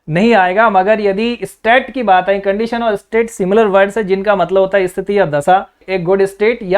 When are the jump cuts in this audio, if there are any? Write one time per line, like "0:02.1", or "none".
0:05.8